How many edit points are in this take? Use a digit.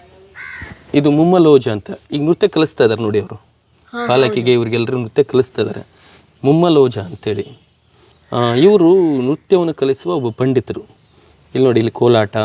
0